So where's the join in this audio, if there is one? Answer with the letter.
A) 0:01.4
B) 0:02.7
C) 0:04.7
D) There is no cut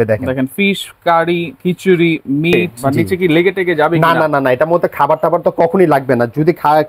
B